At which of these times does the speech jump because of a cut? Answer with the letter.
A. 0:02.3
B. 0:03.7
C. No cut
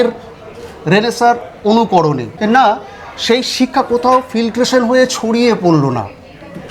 A